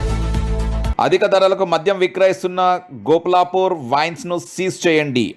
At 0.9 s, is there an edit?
yes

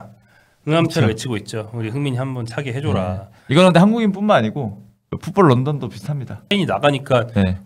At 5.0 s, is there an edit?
no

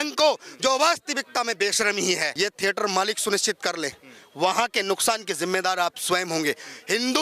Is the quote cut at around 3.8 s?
no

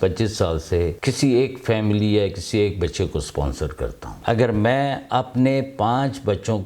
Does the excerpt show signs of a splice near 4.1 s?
yes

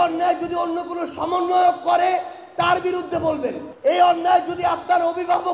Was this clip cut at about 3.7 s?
no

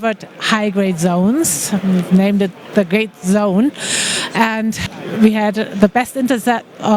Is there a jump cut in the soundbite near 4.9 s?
yes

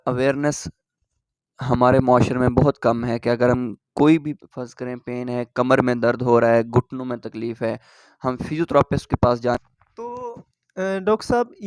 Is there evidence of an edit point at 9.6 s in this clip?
yes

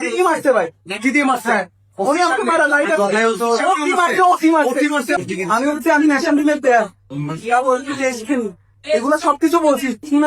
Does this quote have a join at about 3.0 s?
no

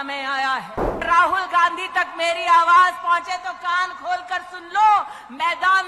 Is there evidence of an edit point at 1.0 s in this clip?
yes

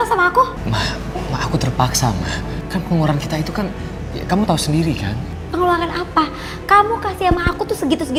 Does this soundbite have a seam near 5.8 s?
no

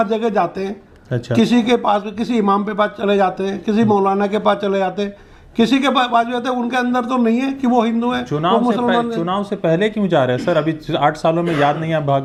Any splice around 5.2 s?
no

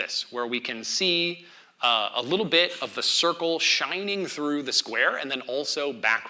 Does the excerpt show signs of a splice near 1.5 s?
no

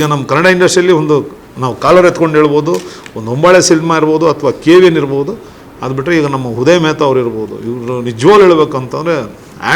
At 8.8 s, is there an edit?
no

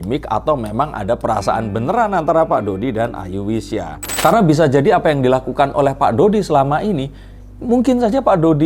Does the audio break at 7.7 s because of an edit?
no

